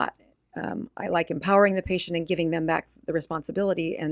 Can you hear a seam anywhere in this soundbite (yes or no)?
no